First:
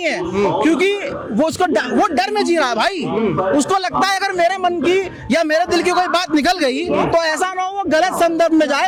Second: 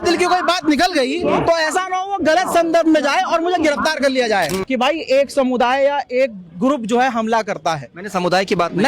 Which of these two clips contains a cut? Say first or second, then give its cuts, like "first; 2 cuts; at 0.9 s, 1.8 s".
second; 1 cut; at 4.6 s